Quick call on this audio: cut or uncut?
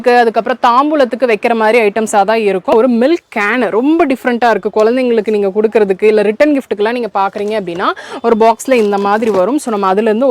cut